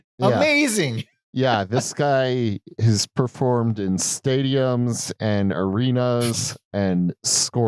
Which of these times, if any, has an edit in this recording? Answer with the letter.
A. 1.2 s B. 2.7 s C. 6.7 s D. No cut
B